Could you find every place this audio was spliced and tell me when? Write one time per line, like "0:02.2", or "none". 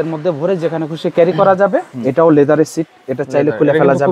0:01.9